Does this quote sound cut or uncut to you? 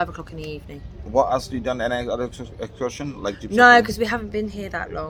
uncut